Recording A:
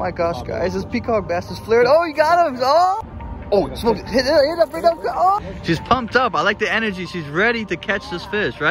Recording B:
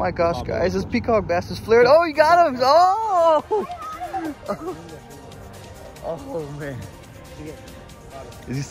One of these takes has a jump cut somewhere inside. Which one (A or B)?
A